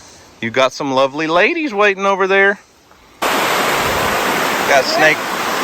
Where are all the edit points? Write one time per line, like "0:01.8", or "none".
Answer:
0:03.2

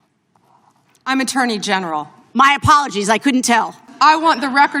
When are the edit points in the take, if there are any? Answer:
0:03.9

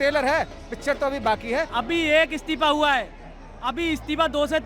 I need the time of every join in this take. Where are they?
0:01.7

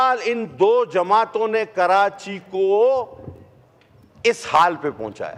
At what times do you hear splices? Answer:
none

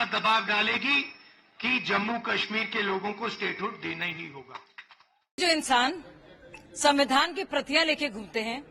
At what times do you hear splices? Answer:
none

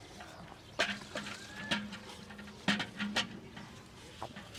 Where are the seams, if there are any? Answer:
none

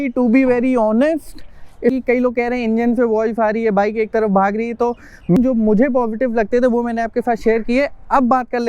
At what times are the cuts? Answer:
0:01.9
0:05.4

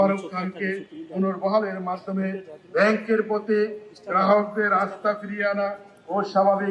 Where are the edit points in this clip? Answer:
none

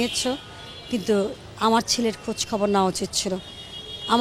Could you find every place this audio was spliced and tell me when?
none

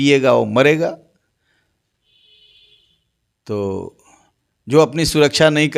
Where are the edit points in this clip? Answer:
none

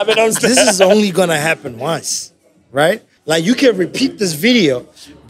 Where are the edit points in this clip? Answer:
0:00.8
0:03.1

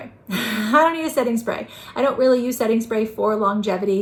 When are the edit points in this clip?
none

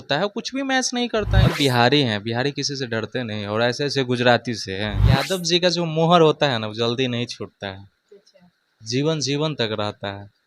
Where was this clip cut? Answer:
0:01.5
0:05.2

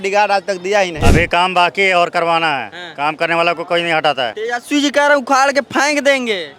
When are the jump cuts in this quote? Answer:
0:00.9
0:04.4

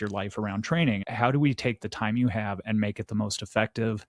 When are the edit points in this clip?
0:01.1

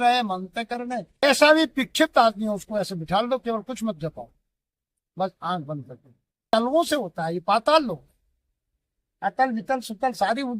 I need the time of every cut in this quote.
0:01.2
0:06.5

